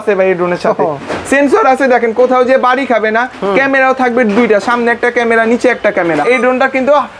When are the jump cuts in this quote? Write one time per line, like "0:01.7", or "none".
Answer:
0:06.2

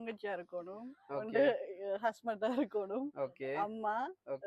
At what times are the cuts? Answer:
none

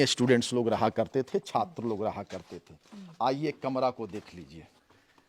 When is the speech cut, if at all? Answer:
none

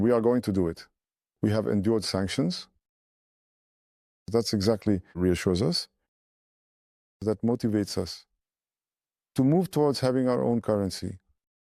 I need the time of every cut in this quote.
0:05.2

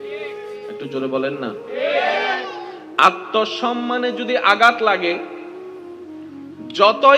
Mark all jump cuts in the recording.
none

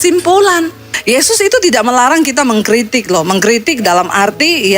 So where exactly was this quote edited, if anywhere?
0:00.9

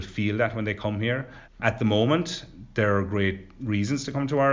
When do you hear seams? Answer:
0:01.5

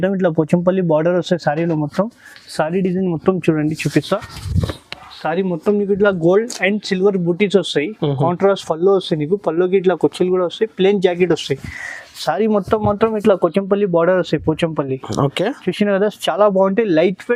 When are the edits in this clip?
none

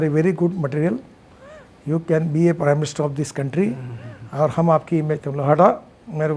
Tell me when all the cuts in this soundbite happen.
none

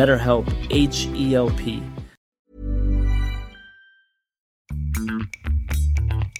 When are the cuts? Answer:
0:04.5

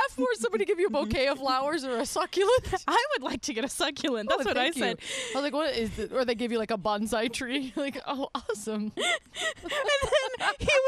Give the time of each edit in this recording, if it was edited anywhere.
none

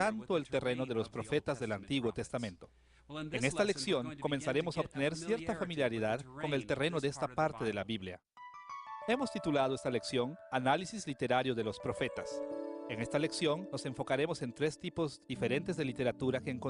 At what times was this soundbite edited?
0:02.2

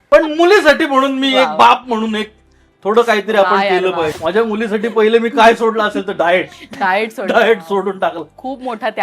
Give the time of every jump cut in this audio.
0:04.2

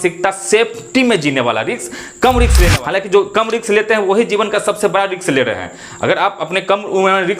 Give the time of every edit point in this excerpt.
0:02.7

